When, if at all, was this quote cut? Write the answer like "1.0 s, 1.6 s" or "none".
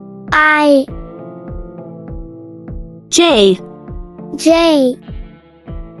5.0 s

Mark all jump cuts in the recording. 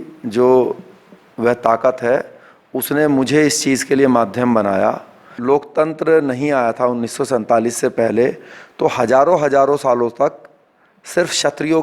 5.3 s

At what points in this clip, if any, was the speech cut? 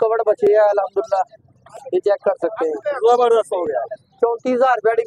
none

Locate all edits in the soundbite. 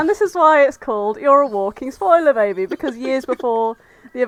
none

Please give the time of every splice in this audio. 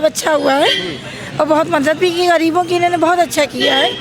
none

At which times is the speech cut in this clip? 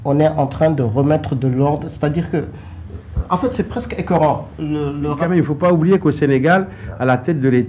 5.2 s

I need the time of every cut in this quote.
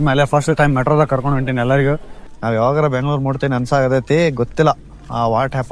2.1 s

